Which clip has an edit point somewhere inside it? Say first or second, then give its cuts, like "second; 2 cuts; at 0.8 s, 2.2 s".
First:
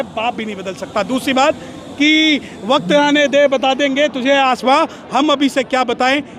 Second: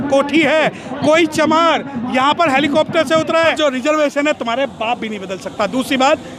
second; 1 cut; at 3.5 s